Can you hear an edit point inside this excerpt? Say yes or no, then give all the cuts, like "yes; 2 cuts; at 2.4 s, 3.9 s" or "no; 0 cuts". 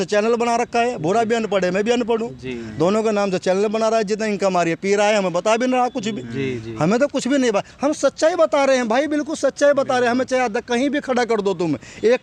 no; 0 cuts